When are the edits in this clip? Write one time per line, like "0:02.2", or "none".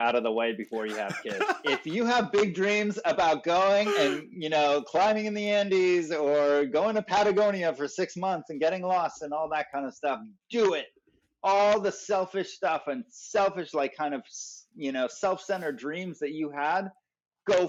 none